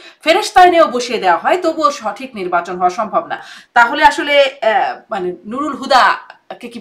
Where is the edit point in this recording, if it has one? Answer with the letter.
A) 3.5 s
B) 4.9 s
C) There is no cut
A